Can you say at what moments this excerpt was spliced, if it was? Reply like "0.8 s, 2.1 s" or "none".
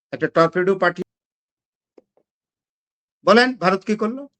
1.0 s